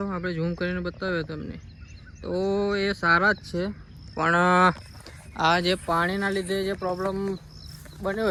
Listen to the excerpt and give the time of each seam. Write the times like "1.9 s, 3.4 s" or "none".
none

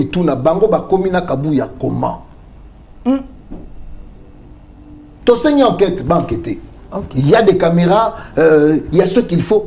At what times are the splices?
none

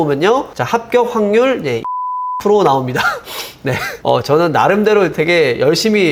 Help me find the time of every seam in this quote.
none

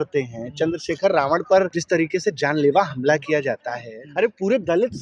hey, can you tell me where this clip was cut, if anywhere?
1.8 s, 4.0 s

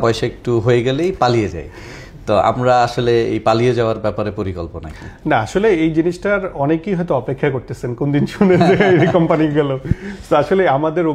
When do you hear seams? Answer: none

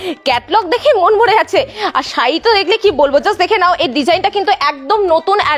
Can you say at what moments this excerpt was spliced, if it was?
none

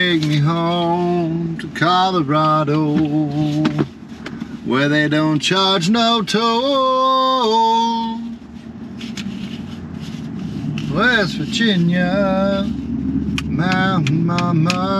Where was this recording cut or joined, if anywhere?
none

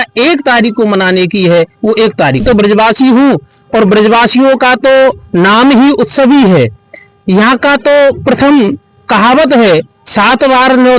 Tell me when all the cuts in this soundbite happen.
2.4 s

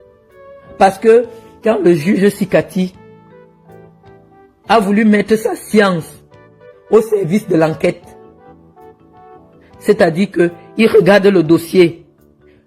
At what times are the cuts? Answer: 2.9 s, 4.6 s

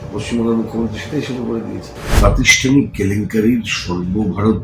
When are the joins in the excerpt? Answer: 2.0 s

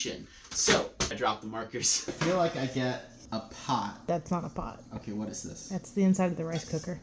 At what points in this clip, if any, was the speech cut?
2.1 s

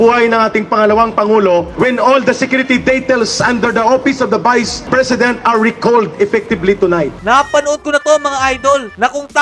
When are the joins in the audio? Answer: 1.7 s, 4.8 s, 7.2 s

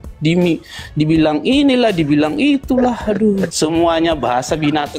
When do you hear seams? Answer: 3.5 s

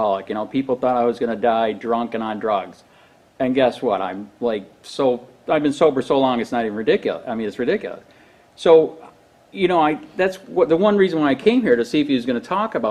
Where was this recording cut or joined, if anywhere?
none

